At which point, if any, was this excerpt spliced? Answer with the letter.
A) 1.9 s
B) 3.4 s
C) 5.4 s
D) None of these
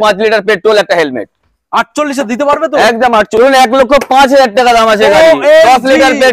B